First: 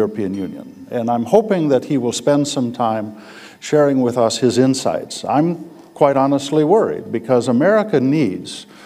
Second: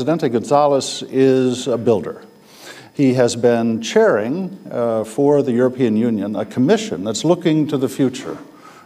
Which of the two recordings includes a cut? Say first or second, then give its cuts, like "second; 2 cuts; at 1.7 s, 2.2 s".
second; 1 cut; at 5.4 s